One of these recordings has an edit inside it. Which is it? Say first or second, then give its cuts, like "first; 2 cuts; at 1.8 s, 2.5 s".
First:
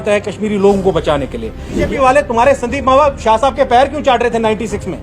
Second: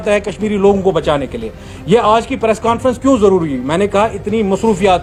first; 1 cut; at 1.8 s